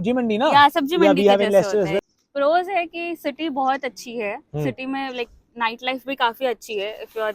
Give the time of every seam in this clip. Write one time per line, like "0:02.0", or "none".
0:02.0